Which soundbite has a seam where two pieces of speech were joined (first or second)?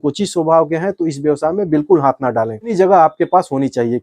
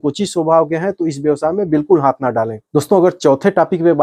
first